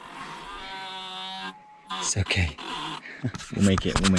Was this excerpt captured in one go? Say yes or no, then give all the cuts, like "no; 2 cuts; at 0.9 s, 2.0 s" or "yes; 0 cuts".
yes; 0 cuts